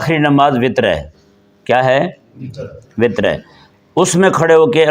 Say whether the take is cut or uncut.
uncut